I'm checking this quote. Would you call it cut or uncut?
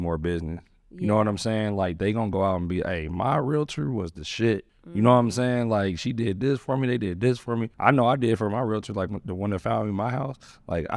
cut